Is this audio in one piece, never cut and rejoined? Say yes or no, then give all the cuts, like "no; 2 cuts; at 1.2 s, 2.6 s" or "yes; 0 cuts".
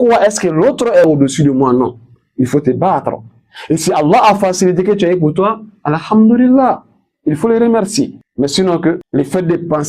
no; 2 cuts; at 8.2 s, 9.0 s